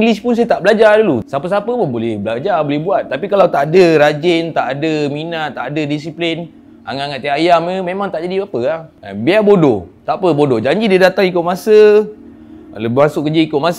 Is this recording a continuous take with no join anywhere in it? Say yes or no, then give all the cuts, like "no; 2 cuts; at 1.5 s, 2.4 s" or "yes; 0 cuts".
no; 1 cut; at 1.2 s